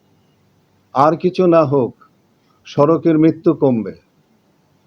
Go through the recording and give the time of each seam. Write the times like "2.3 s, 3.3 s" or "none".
none